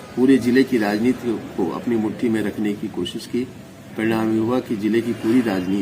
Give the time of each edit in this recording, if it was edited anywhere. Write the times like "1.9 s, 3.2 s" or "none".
none